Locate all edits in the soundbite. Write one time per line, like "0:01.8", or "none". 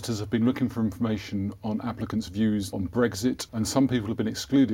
0:02.7
0:03.4